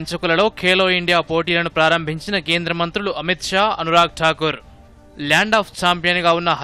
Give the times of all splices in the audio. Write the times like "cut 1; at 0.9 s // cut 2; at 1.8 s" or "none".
none